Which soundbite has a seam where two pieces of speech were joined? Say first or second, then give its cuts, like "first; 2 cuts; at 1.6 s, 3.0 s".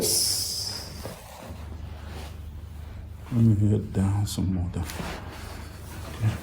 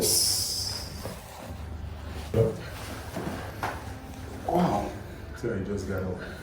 second; 1 cut; at 2.3 s